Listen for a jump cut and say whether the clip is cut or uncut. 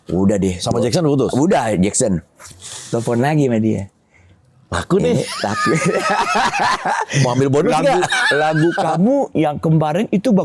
uncut